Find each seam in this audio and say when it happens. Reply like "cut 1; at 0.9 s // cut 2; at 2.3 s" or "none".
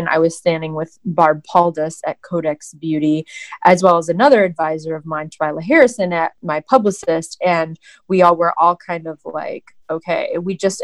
cut 1; at 6.4 s